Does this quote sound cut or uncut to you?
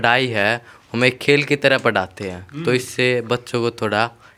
uncut